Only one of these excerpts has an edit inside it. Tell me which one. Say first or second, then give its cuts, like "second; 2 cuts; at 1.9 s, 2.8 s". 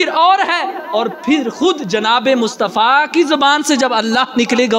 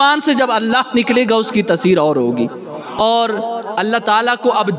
second; 1 cut; at 3.0 s